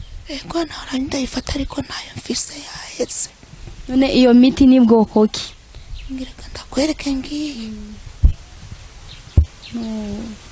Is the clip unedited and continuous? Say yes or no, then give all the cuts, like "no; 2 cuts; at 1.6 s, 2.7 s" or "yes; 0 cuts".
yes; 0 cuts